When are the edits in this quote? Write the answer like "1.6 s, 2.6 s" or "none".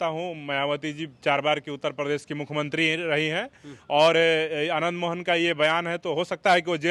none